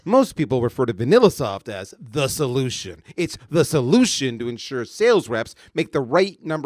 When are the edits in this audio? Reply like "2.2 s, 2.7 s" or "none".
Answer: none